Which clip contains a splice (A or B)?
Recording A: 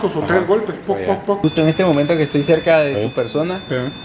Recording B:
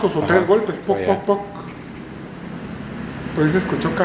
A